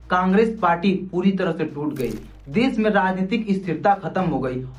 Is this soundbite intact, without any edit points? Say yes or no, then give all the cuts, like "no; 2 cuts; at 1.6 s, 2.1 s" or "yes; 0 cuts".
yes; 0 cuts